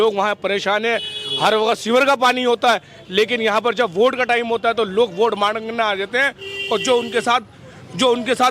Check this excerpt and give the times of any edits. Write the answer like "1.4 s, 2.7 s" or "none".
none

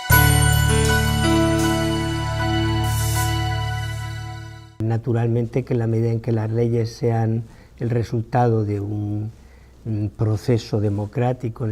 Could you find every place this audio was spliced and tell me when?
none

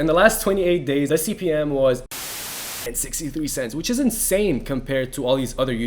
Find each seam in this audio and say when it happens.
1.1 s, 2.6 s

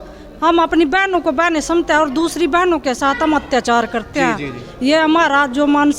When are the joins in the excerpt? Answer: none

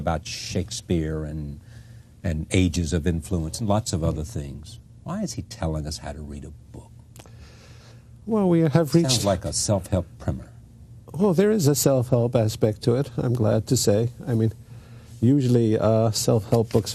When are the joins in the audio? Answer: none

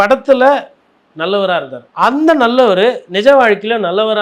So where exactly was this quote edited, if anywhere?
1.8 s

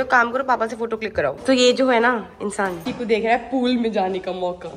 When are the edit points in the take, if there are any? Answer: 1.4 s, 2.8 s

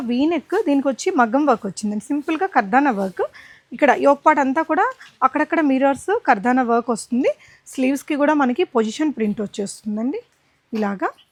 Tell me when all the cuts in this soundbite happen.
none

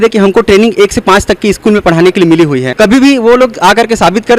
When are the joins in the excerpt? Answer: 2.7 s

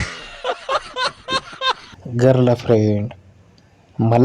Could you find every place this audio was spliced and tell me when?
1.9 s

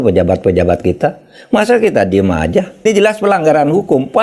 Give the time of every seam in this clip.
2.8 s

